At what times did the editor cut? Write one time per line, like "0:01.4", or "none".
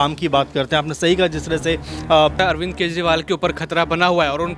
0:02.4